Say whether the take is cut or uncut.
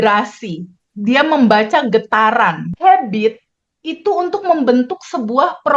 cut